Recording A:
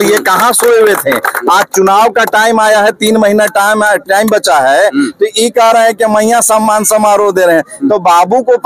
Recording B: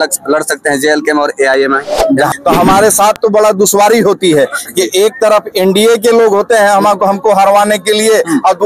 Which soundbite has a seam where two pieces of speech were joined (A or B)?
B